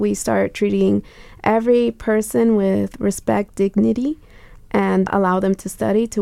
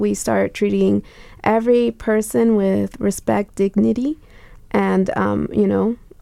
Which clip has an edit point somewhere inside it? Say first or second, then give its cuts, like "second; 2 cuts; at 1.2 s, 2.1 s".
first; 1 cut; at 5.1 s